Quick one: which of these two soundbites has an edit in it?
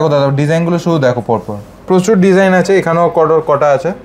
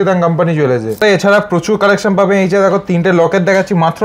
second; 1 cut; at 1.0 s

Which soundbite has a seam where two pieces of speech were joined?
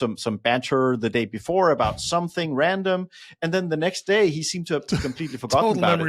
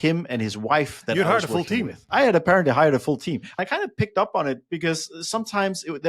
second; 2 cuts; at 2.0 s, 3.5 s

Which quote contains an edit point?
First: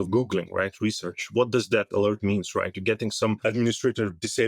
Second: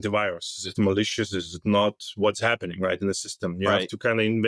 first; 2 cuts; at 1.2 s, 3.4 s

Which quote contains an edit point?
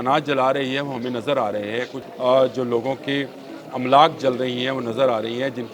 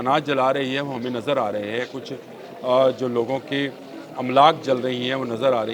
first; 1 cut; at 2.0 s

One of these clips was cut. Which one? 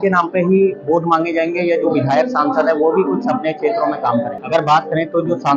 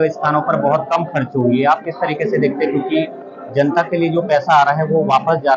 first; 1 cut; at 4.4 s

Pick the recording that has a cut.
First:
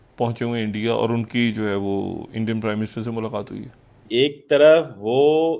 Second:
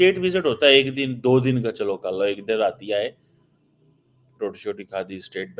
first; 1 cut; at 4.1 s

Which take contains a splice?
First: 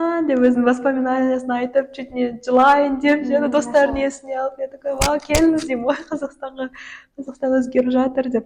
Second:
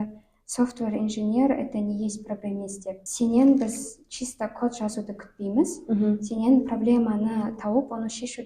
second; 1 cut; at 3.0 s

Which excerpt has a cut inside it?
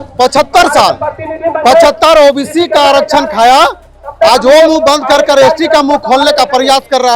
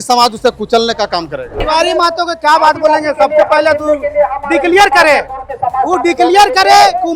second; 1 cut; at 1.6 s

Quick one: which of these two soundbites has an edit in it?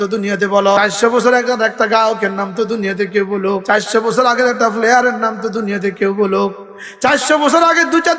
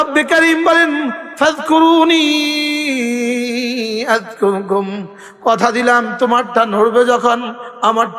first; 2 cuts; at 0.9 s, 3.6 s

